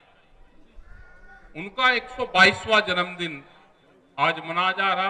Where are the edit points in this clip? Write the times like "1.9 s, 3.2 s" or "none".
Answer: none